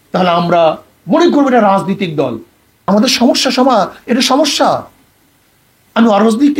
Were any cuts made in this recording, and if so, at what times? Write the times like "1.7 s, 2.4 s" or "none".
2.9 s